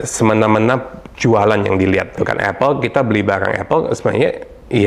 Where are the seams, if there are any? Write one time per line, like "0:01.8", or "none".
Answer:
0:02.2